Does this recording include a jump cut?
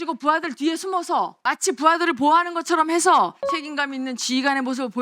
yes; 2 cuts; at 1.4 s, 3.5 s

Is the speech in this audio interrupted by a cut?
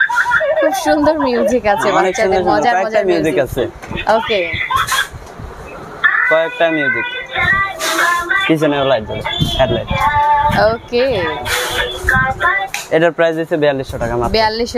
no; 0 cuts

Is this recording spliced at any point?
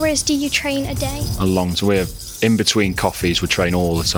yes; 1 cut; at 1.2 s

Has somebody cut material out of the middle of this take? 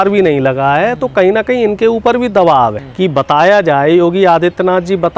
yes; 1 cut; at 2.8 s

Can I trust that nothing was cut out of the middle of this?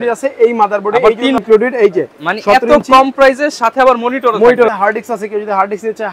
no; 2 cuts; at 1.4 s, 4.7 s

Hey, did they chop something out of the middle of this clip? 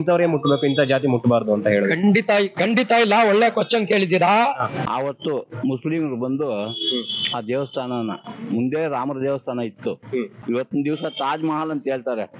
yes; 2 cuts; at 4.8 s, 10.4 s

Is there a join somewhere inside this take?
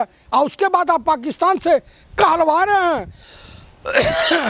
no; 0 cuts

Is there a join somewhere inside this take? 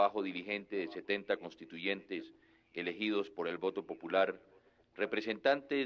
yes; 1 cut; at 2.6 s

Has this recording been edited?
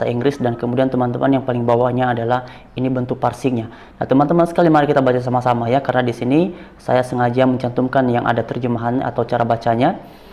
no; 0 cuts

